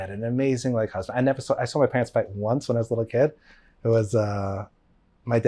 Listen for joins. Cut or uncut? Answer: uncut